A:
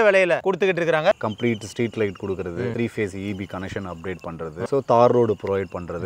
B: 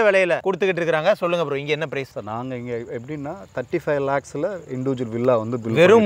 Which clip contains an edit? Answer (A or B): A